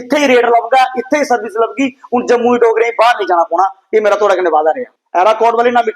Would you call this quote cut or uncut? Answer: cut